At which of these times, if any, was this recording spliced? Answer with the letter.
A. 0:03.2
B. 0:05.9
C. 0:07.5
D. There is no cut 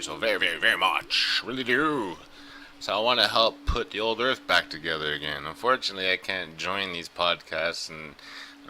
C